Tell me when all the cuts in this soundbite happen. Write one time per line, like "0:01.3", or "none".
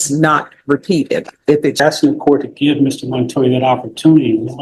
0:01.8

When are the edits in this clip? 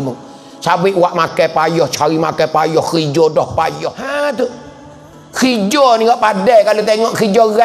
0:04.0

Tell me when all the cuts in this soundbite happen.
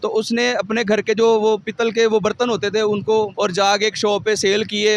0:03.3

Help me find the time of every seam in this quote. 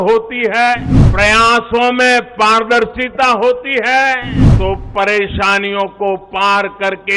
0:01.0
0:04.4

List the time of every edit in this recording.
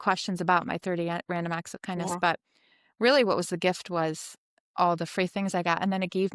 none

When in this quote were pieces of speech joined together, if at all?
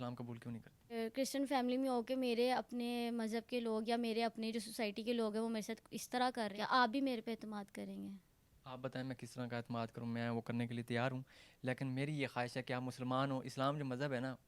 0:00.9
0:06.5

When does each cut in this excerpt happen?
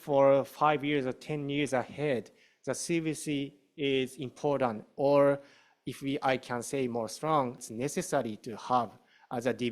0:07.6

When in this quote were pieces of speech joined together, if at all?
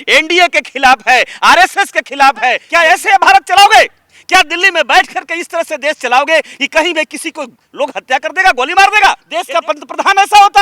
0:02.6
0:09.3

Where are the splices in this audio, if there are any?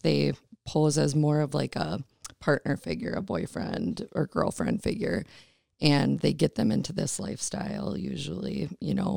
none

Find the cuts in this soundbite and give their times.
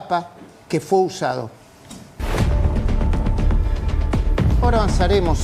none

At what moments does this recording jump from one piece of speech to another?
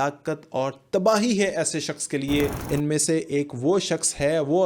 0:02.6

